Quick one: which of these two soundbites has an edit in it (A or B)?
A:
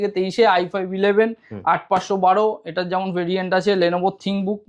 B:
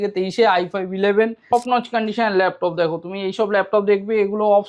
B